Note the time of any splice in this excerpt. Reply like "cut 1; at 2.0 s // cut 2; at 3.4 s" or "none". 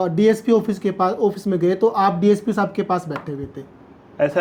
none